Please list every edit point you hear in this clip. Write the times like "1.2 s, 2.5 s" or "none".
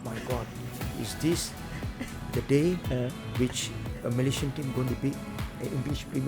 none